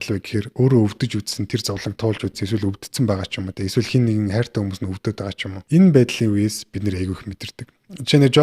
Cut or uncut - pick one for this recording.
cut